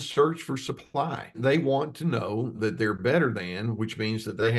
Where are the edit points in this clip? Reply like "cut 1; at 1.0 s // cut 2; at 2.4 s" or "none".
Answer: cut 1; at 1.4 s // cut 2; at 2.5 s